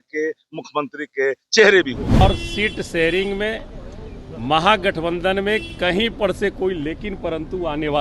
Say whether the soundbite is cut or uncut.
cut